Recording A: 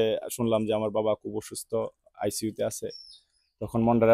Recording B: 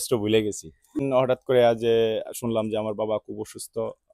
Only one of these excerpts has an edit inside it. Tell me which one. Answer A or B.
B